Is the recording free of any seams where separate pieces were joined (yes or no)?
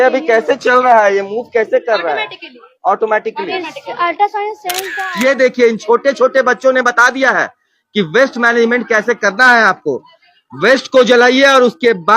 no